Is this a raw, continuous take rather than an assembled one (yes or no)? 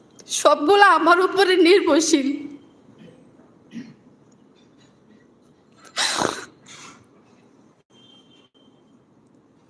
yes